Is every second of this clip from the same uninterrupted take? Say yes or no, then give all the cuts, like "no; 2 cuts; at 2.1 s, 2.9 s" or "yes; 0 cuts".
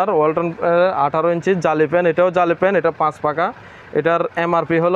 yes; 0 cuts